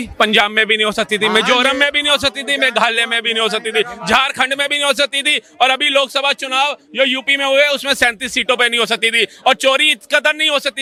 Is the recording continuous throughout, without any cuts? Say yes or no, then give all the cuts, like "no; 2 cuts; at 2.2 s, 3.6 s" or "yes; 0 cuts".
yes; 0 cuts